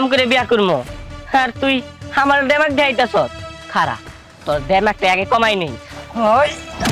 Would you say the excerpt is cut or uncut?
uncut